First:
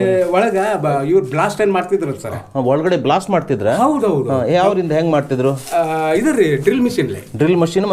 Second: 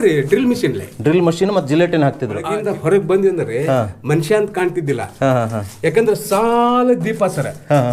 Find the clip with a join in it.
second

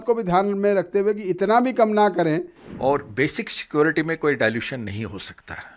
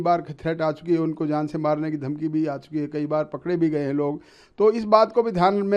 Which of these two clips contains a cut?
first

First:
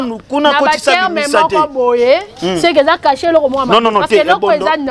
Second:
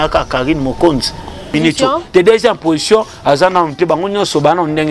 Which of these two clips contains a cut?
second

